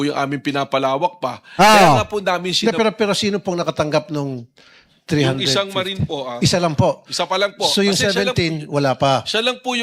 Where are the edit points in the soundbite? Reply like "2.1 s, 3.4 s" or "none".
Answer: none